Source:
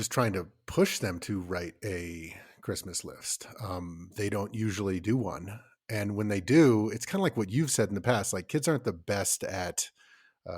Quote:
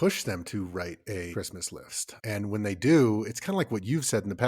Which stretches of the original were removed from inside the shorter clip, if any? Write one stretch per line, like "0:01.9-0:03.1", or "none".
0:02.6-0:05.5